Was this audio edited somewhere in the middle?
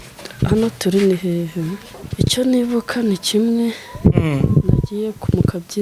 yes; 1 cut; at 1.9 s

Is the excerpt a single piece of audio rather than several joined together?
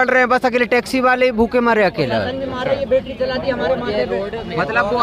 yes; 0 cuts

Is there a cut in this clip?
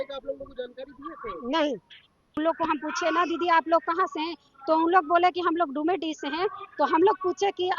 yes; 1 cut; at 2.4 s

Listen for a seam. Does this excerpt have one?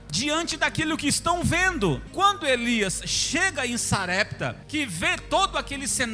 yes; 2 cuts; at 2.1 s, 4.6 s

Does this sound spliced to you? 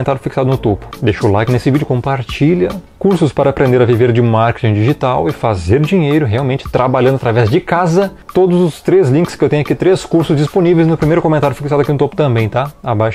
no; 0 cuts

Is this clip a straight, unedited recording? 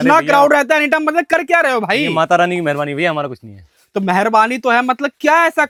yes; 0 cuts

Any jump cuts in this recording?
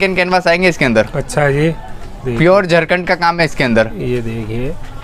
no; 0 cuts

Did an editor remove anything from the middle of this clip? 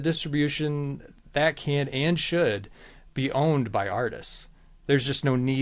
no; 0 cuts

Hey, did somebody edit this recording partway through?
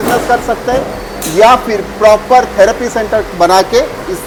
no; 0 cuts

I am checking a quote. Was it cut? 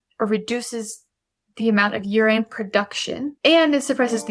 yes; 1 cut; at 3.3 s

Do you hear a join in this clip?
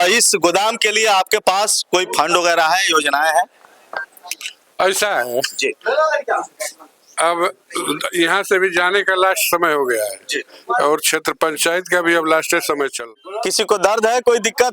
yes; 1 cut; at 13.0 s

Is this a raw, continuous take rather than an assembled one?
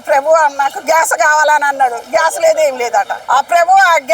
no; 1 cut; at 3.2 s

